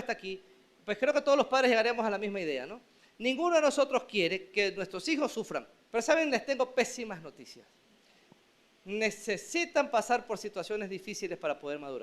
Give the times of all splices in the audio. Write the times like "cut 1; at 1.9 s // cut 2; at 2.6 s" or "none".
cut 1; at 5.8 s